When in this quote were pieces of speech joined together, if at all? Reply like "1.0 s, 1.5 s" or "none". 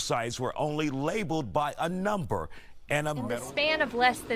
3.3 s